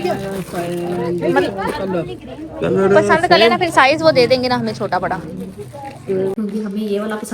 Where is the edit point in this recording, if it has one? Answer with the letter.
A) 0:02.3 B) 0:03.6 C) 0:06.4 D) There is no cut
C